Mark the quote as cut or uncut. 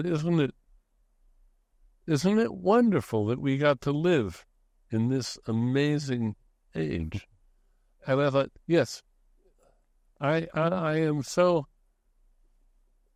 uncut